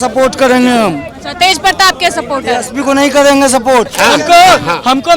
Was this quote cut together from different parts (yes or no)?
yes